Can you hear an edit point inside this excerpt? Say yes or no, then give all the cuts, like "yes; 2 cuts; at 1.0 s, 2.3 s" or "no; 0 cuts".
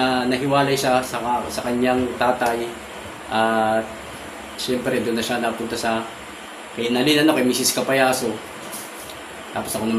no; 0 cuts